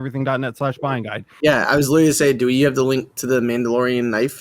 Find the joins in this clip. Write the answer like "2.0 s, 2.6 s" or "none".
1.3 s